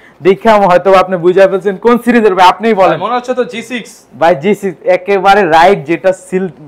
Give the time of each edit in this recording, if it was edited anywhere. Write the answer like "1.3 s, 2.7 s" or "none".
none